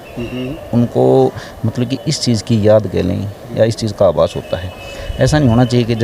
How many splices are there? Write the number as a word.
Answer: zero